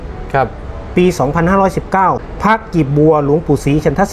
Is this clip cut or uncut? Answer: cut